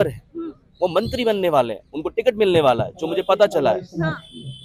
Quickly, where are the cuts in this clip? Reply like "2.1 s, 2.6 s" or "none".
none